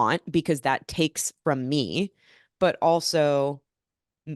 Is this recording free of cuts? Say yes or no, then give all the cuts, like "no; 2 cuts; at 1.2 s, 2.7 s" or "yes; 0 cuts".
yes; 0 cuts